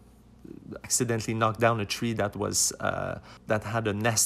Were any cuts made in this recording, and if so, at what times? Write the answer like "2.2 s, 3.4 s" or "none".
0.8 s, 3.3 s